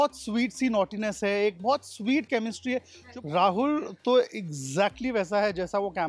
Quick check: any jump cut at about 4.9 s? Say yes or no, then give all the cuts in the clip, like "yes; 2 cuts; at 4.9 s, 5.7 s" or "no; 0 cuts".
no; 1 cut; at 3.0 s